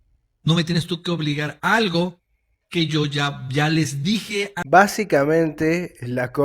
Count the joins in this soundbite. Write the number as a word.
one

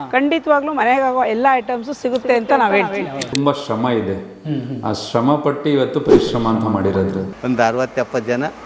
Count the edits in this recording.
two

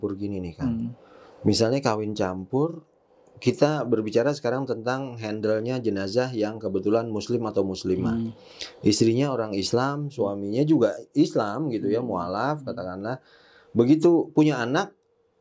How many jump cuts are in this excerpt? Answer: zero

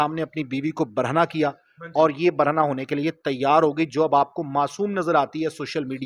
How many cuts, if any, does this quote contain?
zero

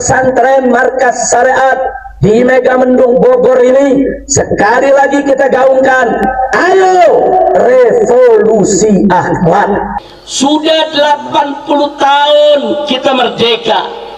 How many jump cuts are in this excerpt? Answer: one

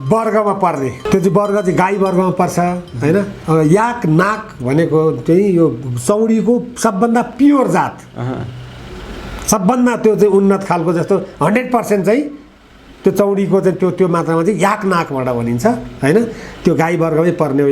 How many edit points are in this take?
two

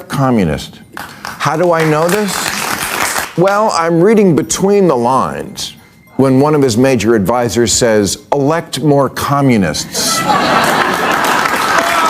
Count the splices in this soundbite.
one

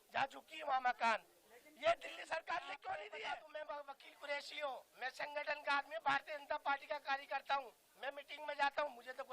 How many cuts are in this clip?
one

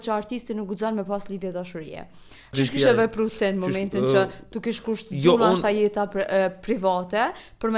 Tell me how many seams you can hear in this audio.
one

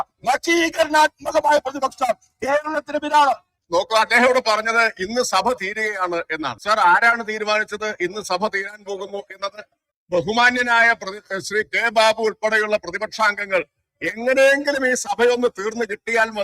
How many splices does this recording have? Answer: one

